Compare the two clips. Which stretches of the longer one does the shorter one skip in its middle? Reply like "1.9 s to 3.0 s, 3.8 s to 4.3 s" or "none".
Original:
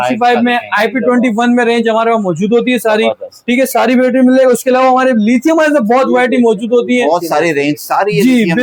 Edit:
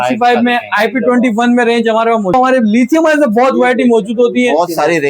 2.3 s to 4.9 s